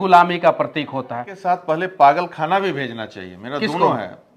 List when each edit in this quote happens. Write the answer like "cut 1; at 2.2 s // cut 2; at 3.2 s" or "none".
cut 1; at 1.3 s